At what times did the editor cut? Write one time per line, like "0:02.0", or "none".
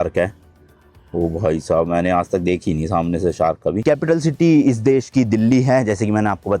0:03.8